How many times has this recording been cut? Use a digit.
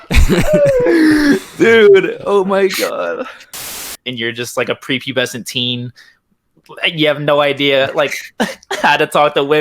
1